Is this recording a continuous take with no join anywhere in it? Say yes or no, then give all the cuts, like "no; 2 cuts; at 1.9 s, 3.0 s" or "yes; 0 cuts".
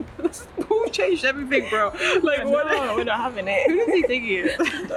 yes; 0 cuts